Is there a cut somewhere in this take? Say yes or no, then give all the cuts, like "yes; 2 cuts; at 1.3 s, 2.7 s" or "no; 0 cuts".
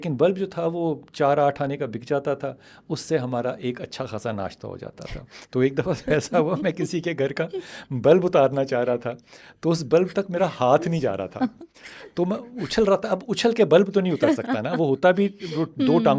no; 0 cuts